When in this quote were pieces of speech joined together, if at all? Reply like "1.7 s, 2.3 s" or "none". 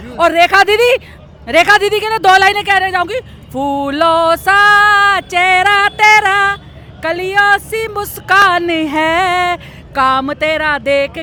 none